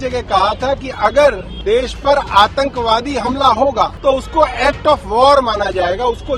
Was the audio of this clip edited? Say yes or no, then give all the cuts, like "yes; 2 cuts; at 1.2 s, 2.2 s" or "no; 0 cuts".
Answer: yes; 2 cuts; at 1.5 s, 3.9 s